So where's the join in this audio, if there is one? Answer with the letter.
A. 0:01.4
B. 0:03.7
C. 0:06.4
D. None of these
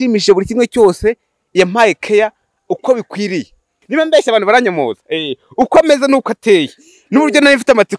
B